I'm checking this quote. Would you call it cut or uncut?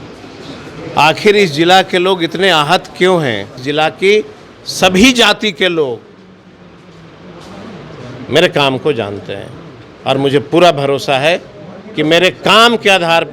cut